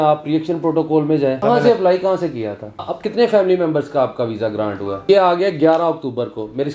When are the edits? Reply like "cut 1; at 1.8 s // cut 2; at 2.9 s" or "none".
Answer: cut 1; at 1.4 s // cut 2; at 3.0 s // cut 3; at 5.0 s